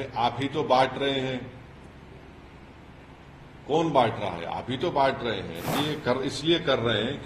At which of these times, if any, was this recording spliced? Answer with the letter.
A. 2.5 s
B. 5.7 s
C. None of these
B